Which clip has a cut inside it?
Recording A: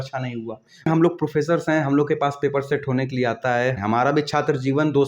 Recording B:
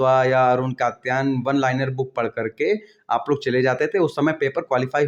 A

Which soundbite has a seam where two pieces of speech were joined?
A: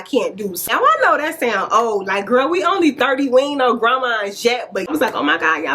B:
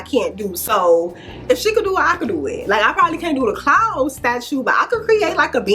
A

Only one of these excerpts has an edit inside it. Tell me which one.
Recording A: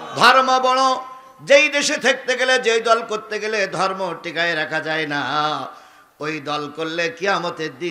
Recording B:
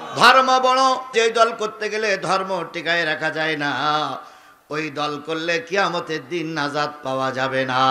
B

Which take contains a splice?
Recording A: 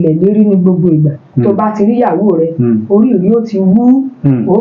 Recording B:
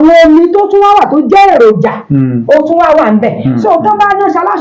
A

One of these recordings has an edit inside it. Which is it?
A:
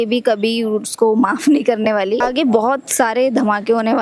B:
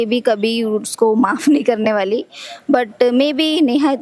A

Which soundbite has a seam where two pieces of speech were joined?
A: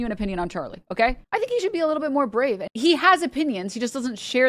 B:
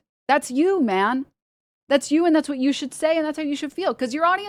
A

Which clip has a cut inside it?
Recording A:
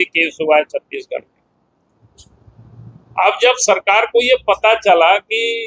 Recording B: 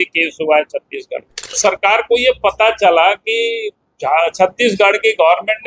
B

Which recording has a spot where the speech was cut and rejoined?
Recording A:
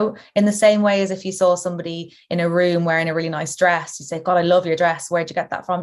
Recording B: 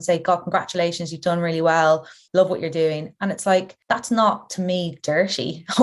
B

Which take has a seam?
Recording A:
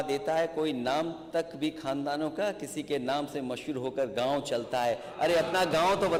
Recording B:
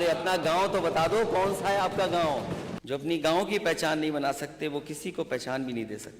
B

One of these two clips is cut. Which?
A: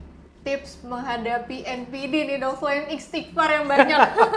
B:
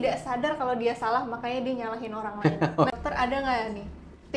B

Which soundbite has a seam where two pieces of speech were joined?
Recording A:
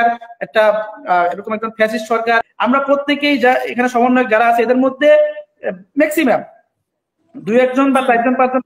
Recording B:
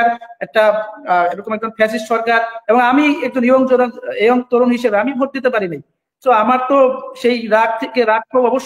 A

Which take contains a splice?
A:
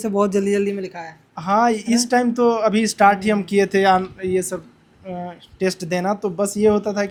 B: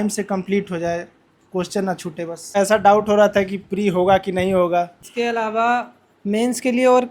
B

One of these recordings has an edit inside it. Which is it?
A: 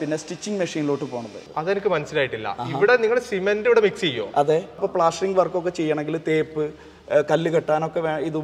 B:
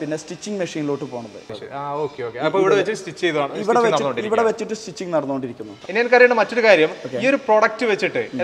A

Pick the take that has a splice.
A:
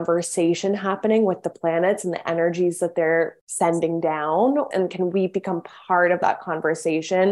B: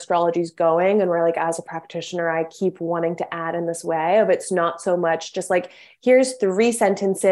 A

